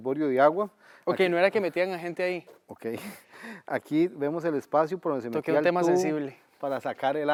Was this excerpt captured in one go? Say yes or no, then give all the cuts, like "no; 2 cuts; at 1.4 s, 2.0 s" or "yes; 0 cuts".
yes; 0 cuts